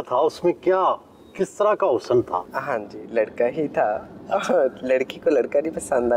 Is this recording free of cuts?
no; 1 cut; at 2.5 s

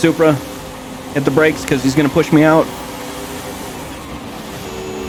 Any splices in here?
no; 0 cuts

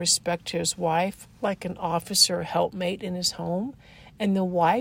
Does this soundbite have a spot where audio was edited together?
no; 0 cuts

